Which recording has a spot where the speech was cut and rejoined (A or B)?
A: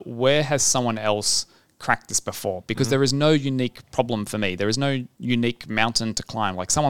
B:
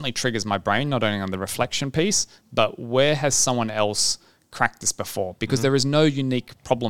A